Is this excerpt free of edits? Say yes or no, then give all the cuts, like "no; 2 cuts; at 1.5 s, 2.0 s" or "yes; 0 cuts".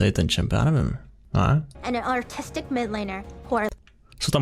no; 1 cut; at 1.7 s